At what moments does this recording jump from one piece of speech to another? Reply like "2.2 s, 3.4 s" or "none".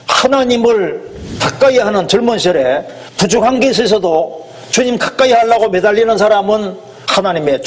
3.0 s

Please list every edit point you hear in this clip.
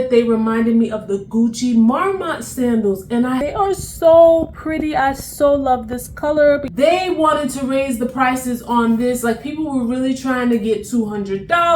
3.4 s, 6.7 s

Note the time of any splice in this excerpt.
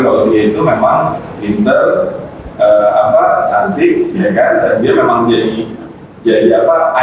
none

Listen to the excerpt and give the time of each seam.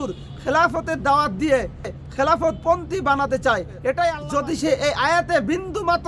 3.8 s

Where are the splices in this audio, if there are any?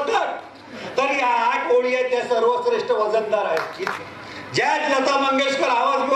3.9 s

